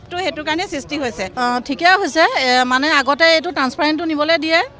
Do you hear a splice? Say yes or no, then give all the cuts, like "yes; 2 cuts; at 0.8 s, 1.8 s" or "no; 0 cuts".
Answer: yes; 1 cut; at 1.3 s